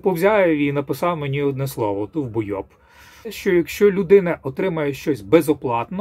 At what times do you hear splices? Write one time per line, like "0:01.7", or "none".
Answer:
0:03.4